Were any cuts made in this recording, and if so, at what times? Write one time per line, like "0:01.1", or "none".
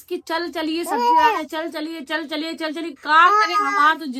none